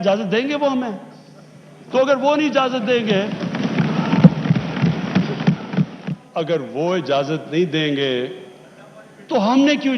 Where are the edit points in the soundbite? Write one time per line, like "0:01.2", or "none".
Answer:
0:06.0